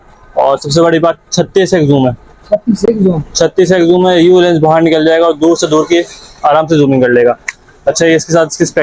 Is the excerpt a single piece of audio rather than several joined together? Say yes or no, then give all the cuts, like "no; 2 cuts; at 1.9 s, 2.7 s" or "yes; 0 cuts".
yes; 0 cuts